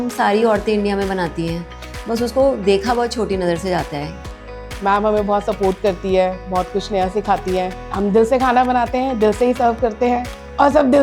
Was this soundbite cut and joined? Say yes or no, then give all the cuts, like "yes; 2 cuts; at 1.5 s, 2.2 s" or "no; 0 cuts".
yes; 2 cuts; at 4.2 s, 7.8 s